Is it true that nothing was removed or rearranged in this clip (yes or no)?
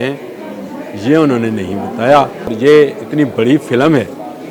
no